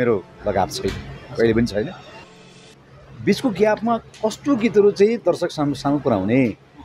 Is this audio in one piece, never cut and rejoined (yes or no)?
no